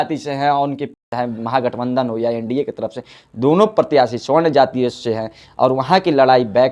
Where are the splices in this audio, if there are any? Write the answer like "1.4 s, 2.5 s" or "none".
0.9 s